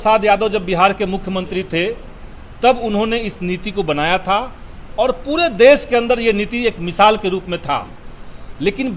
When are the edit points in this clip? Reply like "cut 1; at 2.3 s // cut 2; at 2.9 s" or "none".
none